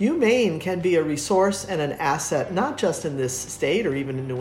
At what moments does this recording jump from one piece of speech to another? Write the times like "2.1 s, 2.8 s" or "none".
none

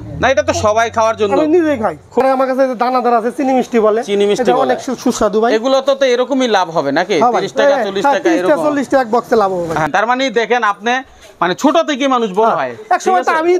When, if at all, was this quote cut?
2.2 s, 9.9 s

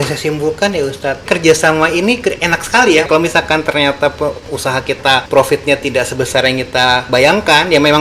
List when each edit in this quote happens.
1.2 s, 3.1 s, 5.3 s, 7.1 s

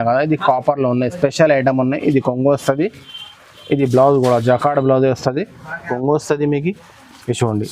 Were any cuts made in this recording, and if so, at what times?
5.9 s

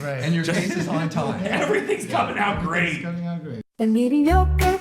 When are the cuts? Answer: 3.6 s

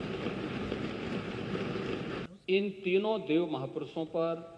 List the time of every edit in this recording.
2.3 s

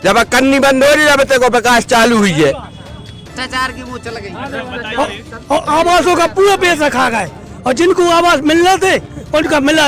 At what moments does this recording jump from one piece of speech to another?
3.3 s

